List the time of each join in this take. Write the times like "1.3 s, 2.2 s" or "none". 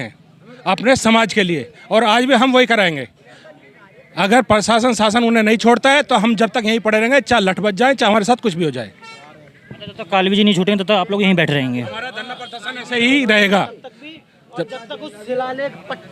none